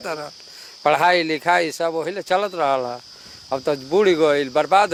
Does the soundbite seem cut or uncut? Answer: uncut